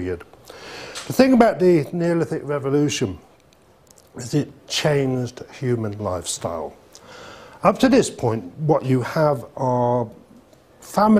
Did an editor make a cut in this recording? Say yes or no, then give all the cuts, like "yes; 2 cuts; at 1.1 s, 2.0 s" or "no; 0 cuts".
no; 0 cuts